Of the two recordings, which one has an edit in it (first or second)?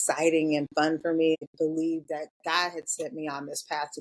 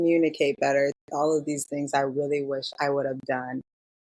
first